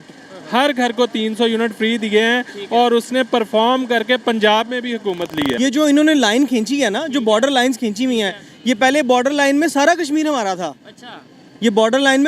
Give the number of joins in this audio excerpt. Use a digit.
1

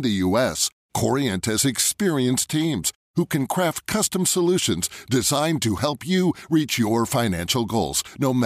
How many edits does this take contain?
0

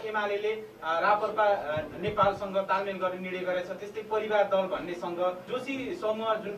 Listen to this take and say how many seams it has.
1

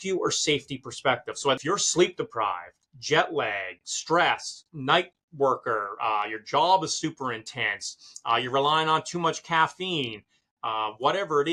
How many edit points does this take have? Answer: 1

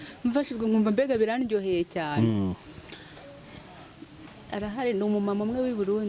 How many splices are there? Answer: 0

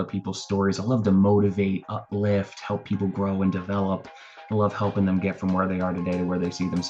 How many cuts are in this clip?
0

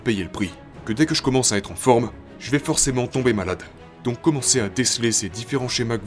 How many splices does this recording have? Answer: 1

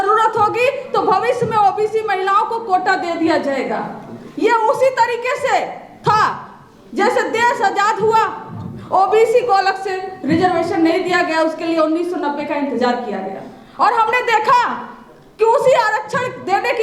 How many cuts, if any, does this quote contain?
0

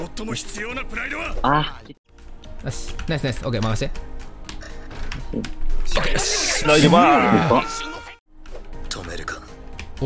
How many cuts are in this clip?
2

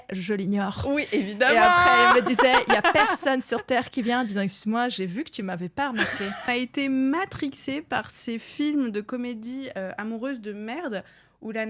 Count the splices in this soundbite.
1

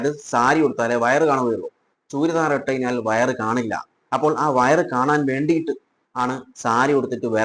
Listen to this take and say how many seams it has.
0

